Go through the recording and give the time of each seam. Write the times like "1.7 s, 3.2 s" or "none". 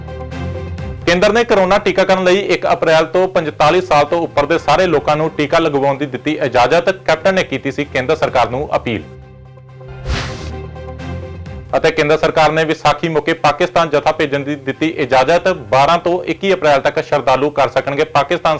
none